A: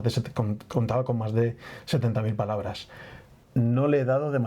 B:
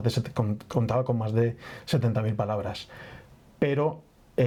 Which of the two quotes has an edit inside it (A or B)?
A